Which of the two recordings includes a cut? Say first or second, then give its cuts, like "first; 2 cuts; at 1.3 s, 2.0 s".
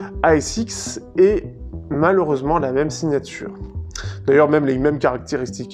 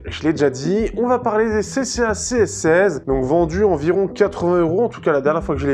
second; 1 cut; at 3.0 s